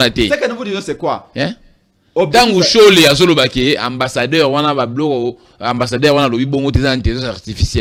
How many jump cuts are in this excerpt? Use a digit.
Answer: 0